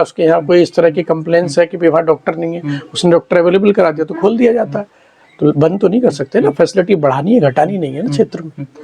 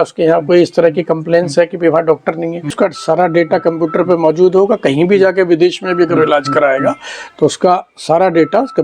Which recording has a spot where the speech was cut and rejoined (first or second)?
second